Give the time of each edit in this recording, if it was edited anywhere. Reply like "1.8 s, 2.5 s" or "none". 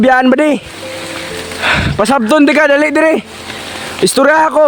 none